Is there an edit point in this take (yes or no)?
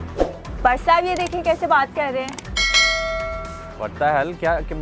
no